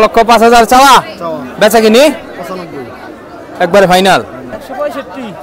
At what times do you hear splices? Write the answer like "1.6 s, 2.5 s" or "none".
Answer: 4.5 s